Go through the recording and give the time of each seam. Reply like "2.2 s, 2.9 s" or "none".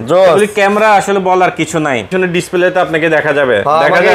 2.1 s